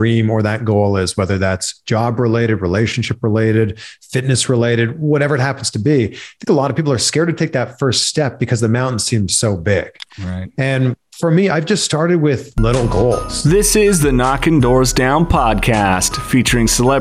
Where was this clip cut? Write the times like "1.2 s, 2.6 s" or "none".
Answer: 13.3 s

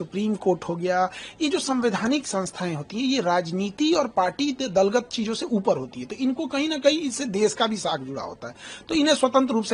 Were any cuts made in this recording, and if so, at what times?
none

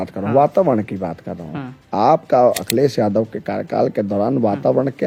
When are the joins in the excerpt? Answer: none

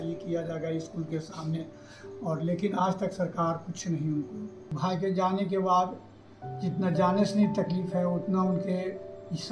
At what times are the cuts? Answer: 4.7 s

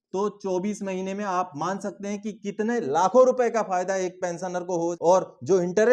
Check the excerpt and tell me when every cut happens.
5.0 s

